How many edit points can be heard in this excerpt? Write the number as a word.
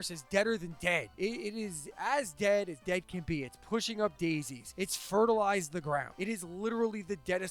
three